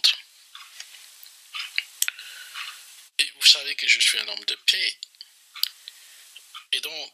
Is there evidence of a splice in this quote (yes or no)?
no